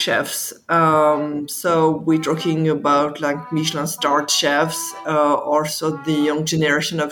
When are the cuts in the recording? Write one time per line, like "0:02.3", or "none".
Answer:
none